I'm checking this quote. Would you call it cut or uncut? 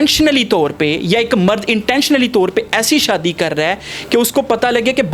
uncut